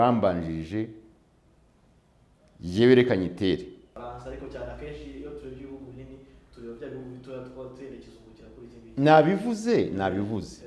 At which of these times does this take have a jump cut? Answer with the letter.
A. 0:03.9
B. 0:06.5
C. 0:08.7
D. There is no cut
A